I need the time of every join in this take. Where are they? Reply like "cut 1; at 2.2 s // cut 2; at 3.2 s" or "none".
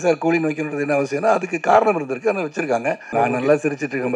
cut 1; at 3.1 s